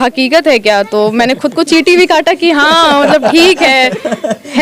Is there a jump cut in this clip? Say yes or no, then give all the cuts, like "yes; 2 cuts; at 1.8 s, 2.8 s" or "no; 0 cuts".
no; 0 cuts